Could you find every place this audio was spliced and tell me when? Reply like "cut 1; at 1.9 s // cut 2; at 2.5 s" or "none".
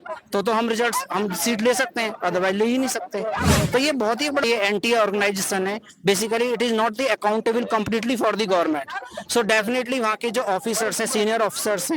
cut 1; at 4.4 s